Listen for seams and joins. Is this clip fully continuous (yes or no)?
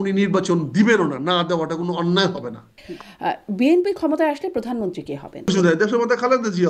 no